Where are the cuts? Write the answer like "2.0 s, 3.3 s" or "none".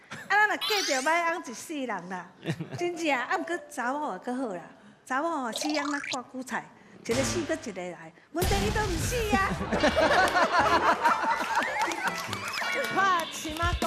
none